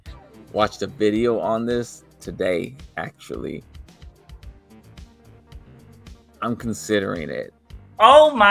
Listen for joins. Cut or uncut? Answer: uncut